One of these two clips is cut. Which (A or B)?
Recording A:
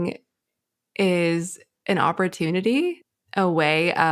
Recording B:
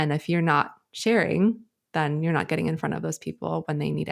A